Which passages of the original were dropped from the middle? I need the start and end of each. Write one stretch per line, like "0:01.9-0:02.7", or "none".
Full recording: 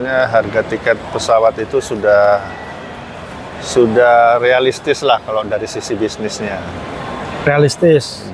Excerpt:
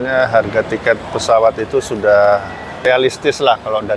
0:02.9-0:04.5